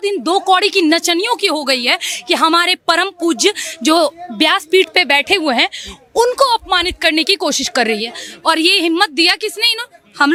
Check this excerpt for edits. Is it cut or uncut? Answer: uncut